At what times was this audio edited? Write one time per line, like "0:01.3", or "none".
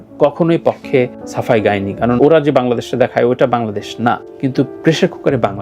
0:02.2